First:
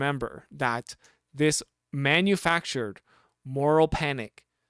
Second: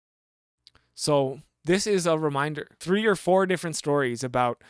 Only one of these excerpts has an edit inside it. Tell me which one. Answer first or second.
second